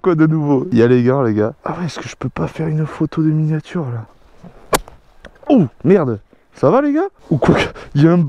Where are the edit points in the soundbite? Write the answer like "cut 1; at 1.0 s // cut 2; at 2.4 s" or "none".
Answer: cut 1; at 1.6 s // cut 2; at 4.0 s // cut 3; at 7.2 s